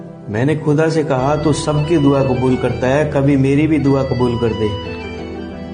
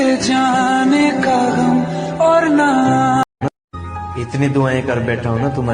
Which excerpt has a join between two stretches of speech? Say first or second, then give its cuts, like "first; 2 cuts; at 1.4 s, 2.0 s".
second; 1 cut; at 3.2 s